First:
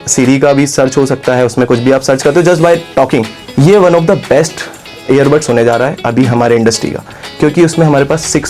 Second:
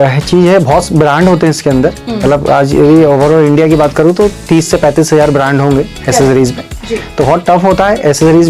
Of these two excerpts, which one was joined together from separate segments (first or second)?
first